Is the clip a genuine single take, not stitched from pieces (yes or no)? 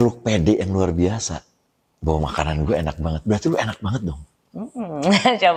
yes